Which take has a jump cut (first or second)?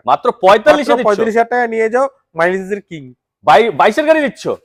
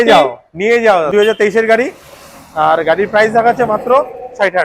second